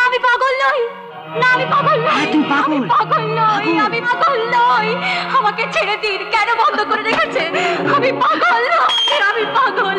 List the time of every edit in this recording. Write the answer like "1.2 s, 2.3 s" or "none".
none